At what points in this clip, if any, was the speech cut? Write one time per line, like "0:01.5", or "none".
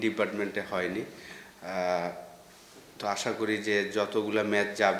none